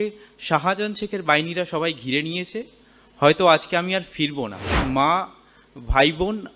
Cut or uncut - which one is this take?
cut